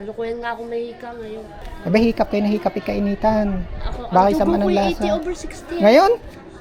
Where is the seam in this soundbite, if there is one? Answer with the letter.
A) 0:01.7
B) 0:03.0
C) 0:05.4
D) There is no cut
A